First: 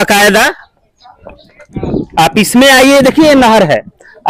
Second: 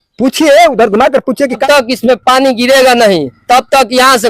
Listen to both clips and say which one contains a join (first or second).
second